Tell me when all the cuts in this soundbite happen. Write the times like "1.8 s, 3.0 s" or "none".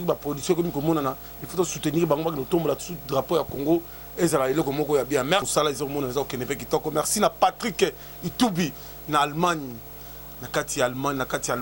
5.5 s